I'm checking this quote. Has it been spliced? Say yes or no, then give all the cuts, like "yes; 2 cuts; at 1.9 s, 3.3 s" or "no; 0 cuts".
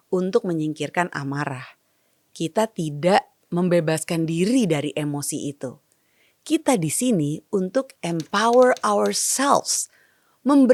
no; 0 cuts